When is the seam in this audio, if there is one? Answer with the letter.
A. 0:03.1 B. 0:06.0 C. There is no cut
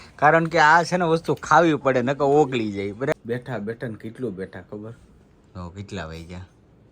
A